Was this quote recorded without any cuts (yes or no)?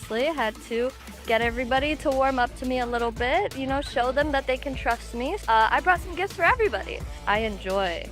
no